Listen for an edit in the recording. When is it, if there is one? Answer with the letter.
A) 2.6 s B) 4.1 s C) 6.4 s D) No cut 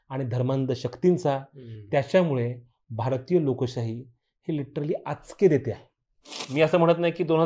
C